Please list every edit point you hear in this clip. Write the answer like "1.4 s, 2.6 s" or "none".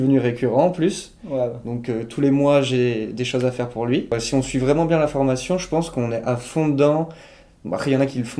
4.2 s